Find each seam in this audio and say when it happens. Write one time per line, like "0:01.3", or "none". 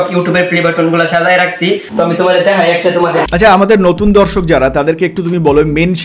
0:01.9
0:03.3